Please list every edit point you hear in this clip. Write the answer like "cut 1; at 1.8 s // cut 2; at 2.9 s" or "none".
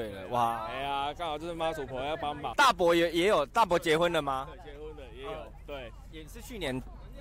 cut 1; at 2.5 s